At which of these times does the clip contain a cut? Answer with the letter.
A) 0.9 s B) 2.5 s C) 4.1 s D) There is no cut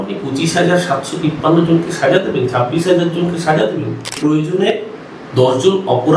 C